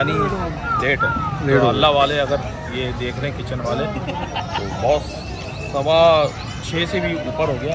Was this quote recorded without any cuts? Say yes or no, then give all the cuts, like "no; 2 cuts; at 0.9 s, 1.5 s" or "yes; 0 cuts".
yes; 0 cuts